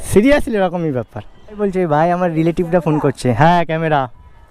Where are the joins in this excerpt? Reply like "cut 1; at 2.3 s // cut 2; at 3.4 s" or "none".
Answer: cut 1; at 1.6 s